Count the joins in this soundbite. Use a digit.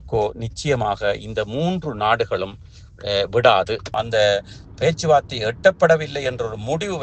1